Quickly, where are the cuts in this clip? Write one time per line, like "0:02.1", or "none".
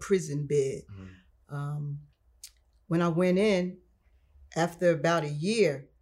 none